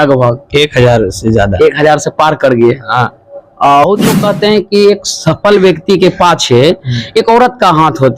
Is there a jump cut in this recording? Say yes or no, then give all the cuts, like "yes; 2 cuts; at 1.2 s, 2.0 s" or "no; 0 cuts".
yes; 1 cut; at 3.8 s